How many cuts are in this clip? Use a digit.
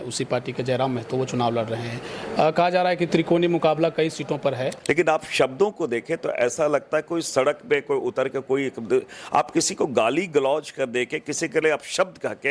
1